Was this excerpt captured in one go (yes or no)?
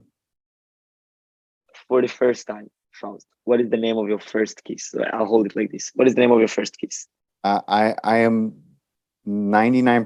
yes